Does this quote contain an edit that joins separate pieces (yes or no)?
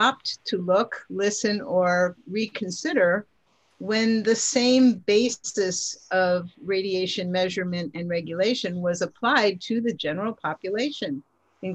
no